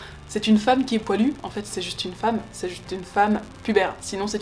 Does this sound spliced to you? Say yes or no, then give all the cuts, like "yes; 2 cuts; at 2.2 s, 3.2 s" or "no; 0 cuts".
no; 0 cuts